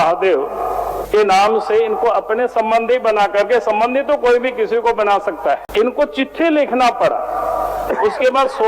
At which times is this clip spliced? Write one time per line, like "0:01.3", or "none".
0:01.0
0:05.6